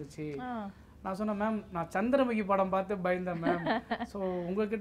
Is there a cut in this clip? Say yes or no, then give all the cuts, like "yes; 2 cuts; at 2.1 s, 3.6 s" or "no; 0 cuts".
no; 0 cuts